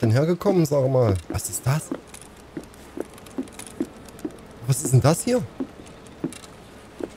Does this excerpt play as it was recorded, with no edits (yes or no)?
no